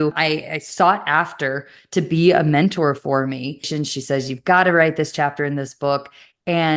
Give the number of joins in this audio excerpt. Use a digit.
1